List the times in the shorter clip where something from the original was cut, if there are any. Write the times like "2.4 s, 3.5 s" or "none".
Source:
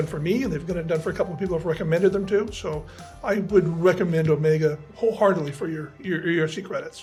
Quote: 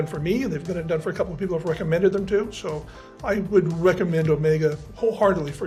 none